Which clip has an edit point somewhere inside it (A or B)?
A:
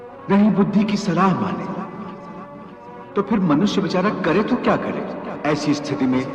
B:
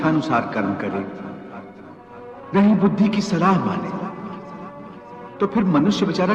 A